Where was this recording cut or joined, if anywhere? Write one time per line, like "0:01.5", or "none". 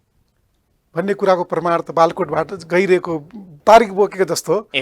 0:03.6